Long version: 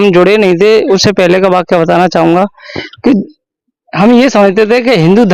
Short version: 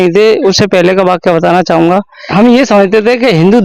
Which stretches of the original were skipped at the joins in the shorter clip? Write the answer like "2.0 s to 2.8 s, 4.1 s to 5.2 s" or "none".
2.6 s to 3.8 s